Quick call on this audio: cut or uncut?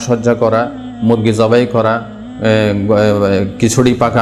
uncut